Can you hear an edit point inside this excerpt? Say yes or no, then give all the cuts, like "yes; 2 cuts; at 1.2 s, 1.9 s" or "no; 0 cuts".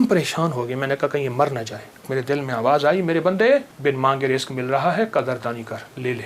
yes; 2 cuts; at 2.1 s, 3.7 s